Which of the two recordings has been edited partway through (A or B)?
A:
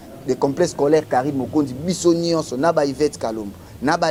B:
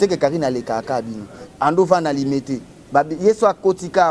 B